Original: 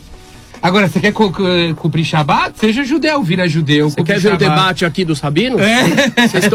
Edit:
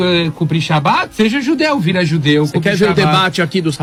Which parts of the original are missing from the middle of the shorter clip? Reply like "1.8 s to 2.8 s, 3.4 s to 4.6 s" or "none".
none

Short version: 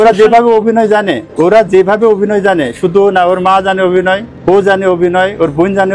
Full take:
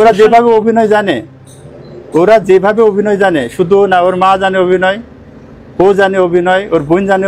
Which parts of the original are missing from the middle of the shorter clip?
1.2 s to 2.0 s, 5.1 s to 5.6 s

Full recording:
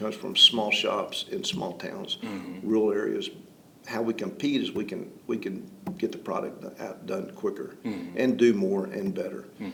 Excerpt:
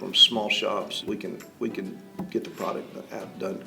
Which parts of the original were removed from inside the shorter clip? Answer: 1.2 s to 4.7 s

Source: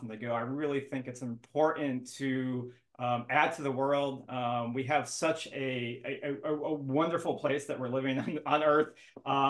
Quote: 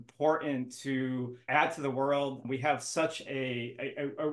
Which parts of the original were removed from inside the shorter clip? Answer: 2.8 s to 3.2 s, 4.2 s to 4.7 s

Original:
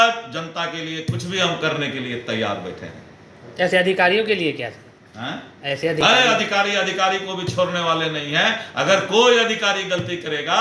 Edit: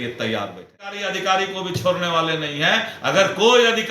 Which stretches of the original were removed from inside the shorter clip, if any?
3.1 s to 6.8 s

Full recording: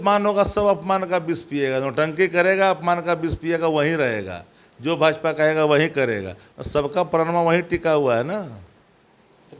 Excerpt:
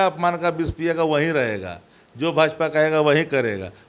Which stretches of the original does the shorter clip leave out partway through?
none

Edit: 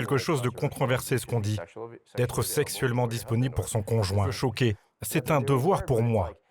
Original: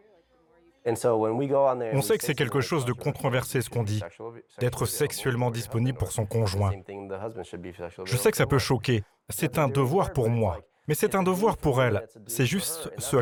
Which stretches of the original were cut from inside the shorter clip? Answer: 6.8 s to 8.6 s

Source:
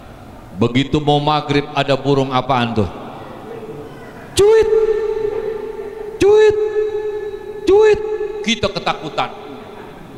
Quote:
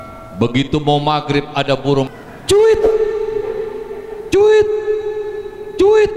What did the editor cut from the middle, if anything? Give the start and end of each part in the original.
2.3 s to 4.0 s

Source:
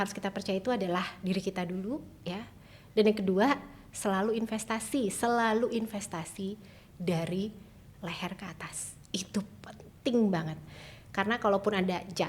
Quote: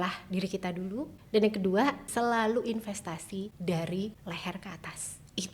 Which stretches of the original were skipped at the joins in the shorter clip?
2.1 s to 2.8 s, 3.7 s to 5.1 s, 6.6 s to 6.9 s, 7.6 s to 7.9 s

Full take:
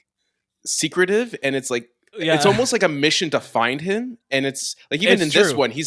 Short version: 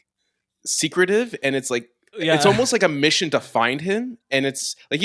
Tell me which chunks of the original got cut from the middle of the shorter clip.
none

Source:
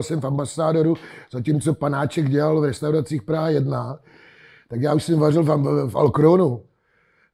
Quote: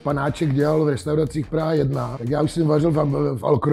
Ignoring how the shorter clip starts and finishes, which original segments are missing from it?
3.9 s to 4.7 s

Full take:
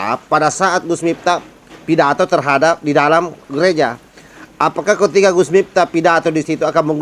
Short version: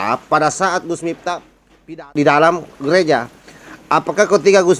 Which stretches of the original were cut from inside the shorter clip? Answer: 2.1 s to 2.8 s

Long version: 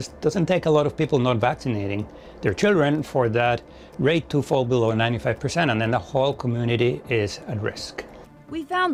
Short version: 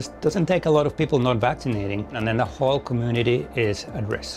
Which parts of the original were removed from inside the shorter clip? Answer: 2.2 s to 5.7 s

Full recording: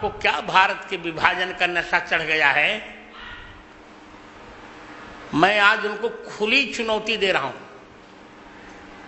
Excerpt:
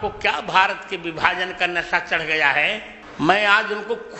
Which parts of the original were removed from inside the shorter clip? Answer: 3.0 s to 5.1 s

